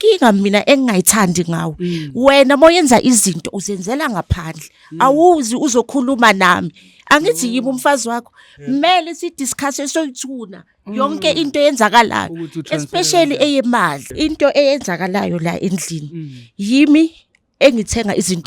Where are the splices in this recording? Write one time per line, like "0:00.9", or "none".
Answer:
0:14.0